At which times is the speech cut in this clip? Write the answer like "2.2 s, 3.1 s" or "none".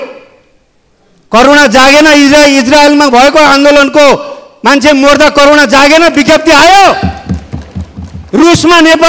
none